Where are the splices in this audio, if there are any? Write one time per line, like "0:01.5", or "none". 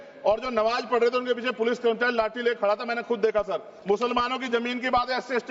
0:03.7

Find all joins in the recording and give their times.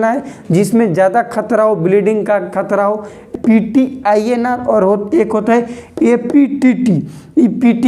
0:03.3

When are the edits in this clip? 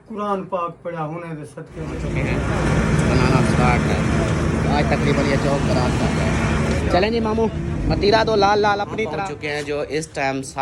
0:02.1
0:09.1

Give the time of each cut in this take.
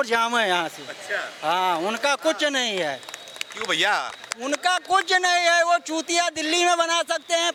none

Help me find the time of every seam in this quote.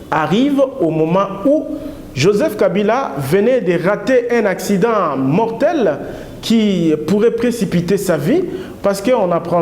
none

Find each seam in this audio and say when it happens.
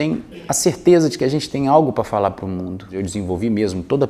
0:02.9

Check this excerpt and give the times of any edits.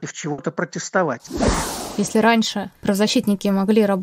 0:01.4
0:02.7

